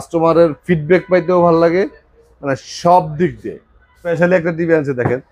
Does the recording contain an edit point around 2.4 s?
no; 1 cut; at 4.0 s

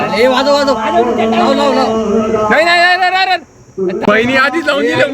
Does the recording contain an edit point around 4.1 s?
yes; 1 cut; at 4.1 s

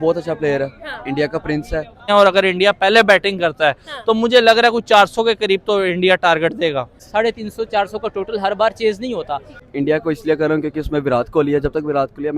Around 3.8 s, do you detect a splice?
no; 3 cuts; at 2.0 s, 7.0 s, 9.6 s

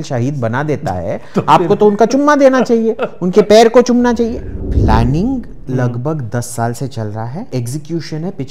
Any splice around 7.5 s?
yes; 2 cuts; at 4.6 s, 7.5 s

